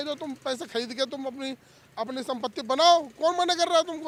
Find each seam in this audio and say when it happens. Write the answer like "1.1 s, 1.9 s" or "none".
none